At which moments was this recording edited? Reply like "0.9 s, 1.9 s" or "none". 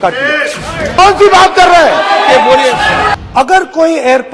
1.0 s, 3.1 s

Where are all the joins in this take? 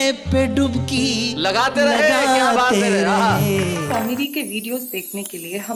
3.8 s

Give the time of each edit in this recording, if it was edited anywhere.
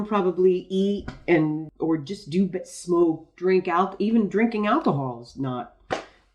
1.7 s

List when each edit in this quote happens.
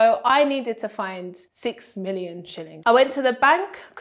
1.4 s, 2.6 s

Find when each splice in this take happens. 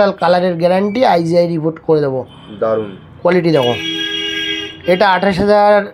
none

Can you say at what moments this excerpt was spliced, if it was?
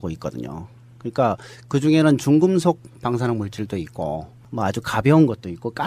none

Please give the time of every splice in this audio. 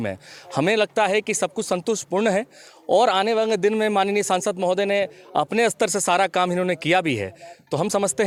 none

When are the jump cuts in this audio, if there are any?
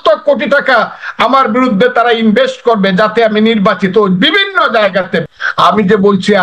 5.2 s

